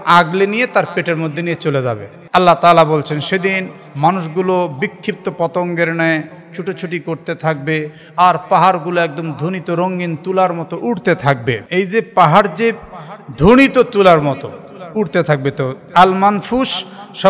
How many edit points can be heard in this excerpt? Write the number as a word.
two